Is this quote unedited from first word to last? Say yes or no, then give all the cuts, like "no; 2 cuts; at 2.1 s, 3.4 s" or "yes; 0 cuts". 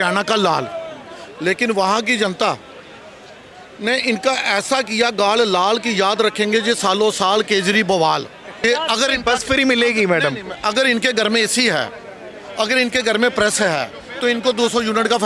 no; 1 cut; at 8.4 s